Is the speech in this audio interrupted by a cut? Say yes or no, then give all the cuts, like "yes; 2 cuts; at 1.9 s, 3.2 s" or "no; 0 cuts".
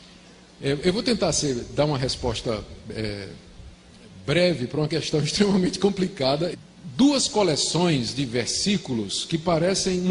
no; 0 cuts